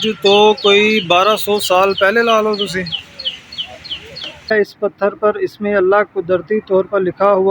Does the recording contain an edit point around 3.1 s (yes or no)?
no